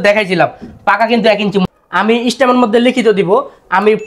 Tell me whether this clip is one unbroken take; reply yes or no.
no